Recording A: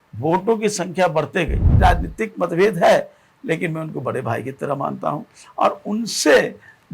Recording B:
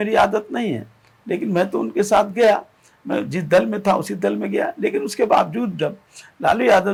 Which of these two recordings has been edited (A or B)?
A